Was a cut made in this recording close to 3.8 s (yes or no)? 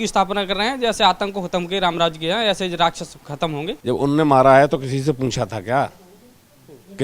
yes